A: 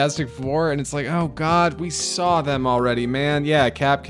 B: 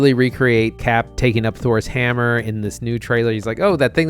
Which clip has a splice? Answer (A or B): B